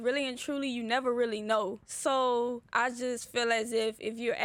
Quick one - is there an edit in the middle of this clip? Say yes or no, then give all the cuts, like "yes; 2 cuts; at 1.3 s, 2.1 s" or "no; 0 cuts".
yes; 2 cuts; at 1.9 s, 2.7 s